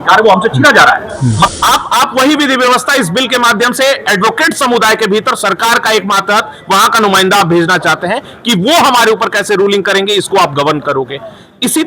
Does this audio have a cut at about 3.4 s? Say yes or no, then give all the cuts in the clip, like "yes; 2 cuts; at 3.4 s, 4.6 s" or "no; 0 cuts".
no; 1 cut; at 1.5 s